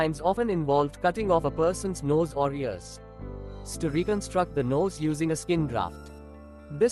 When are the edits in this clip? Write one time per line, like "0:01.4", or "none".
0:03.7

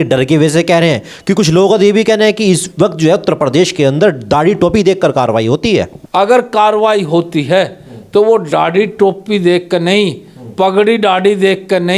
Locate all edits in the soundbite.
0:06.0

